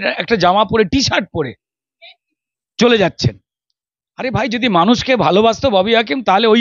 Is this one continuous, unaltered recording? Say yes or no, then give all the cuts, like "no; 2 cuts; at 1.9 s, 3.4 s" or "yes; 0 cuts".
yes; 0 cuts